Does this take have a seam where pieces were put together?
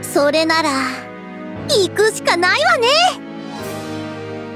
yes; 1 cut; at 3.2 s

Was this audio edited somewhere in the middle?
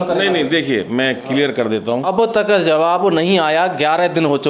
yes; 1 cut; at 2.0 s

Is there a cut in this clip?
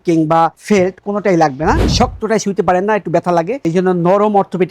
yes; 1 cut; at 1.8 s

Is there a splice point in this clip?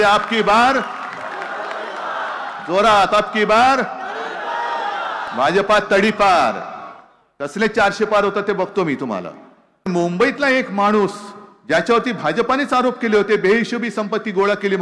yes; 1 cut; at 9.9 s

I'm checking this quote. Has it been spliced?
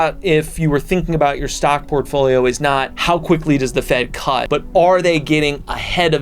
yes; 2 cuts; at 2.9 s, 4.4 s

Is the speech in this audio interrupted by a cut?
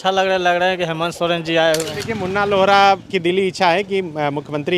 yes; 1 cut; at 2.0 s

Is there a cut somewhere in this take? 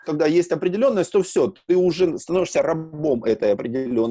no; 0 cuts

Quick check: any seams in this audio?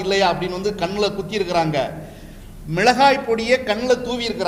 no; 0 cuts

